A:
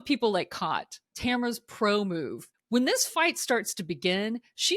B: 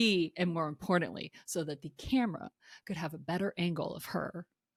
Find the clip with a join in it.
A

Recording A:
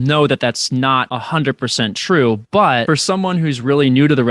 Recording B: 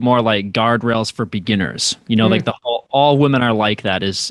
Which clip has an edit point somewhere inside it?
A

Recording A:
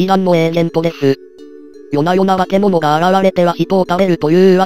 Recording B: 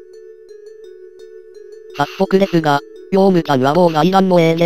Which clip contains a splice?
B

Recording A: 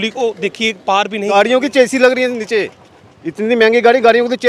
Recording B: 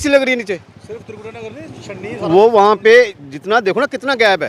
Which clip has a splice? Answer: A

